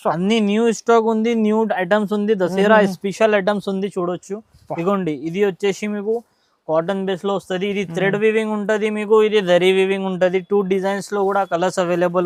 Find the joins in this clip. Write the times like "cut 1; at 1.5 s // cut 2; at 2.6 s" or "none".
none